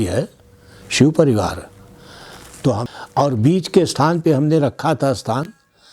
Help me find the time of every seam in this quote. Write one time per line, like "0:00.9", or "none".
0:02.8